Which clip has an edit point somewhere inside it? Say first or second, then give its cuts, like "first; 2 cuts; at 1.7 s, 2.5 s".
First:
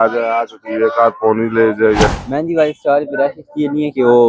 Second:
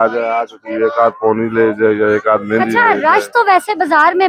first; 1 cut; at 2.1 s